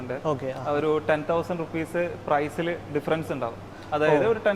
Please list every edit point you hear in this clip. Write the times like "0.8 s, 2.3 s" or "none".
none